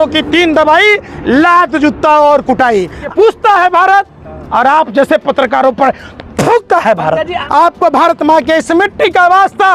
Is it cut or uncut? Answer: cut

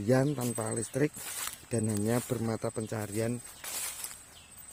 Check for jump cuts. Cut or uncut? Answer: uncut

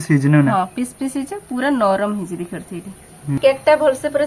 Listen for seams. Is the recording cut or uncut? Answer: cut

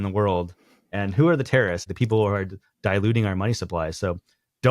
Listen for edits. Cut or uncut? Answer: cut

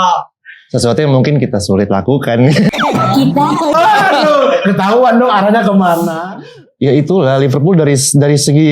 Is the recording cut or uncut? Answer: cut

